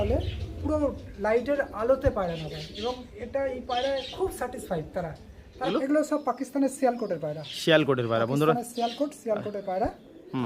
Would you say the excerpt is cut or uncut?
cut